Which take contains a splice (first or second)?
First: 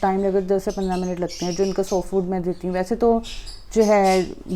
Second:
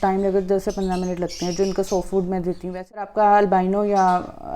second